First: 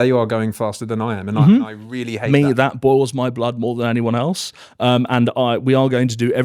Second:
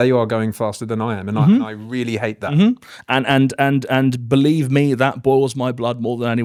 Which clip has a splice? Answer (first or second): first